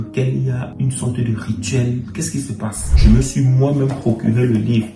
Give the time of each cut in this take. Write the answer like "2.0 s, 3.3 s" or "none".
2.9 s